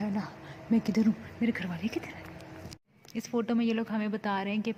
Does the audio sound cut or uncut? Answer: uncut